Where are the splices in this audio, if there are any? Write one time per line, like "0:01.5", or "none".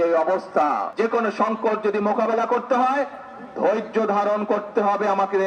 none